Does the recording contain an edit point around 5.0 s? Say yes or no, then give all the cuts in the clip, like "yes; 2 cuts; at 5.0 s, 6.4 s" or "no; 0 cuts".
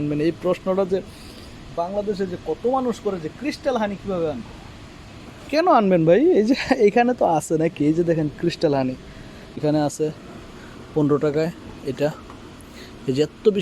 no; 1 cut; at 9.6 s